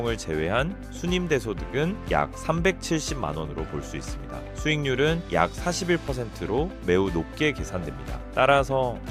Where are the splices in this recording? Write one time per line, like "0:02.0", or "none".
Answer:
none